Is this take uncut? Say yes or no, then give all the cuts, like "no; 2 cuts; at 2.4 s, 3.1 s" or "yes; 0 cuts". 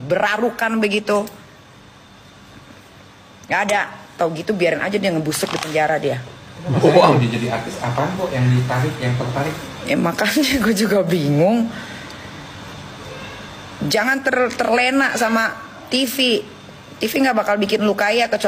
yes; 0 cuts